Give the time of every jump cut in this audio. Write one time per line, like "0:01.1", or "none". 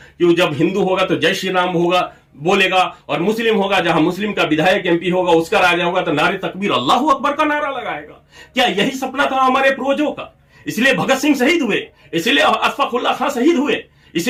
none

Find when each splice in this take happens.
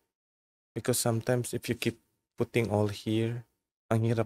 none

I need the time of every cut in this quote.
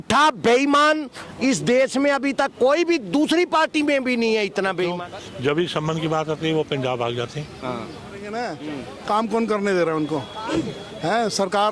0:05.0
0:08.3

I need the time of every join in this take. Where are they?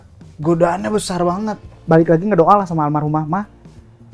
0:01.7

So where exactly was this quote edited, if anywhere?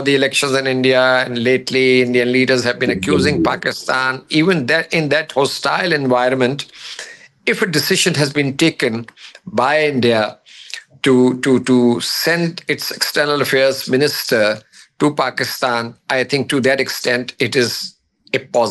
none

